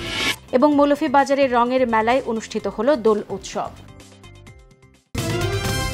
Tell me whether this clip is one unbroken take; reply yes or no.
no